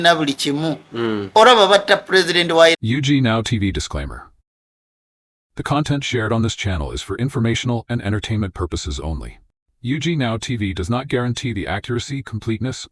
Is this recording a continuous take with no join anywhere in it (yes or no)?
no